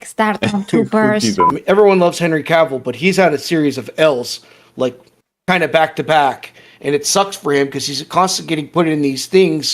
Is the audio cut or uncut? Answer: cut